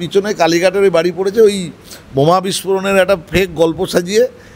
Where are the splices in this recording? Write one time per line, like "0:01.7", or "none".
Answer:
none